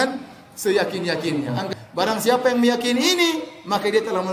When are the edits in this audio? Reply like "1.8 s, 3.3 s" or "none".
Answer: 1.7 s